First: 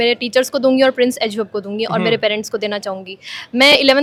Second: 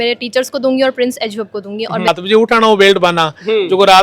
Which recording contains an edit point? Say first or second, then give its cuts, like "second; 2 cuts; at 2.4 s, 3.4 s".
second; 1 cut; at 2.1 s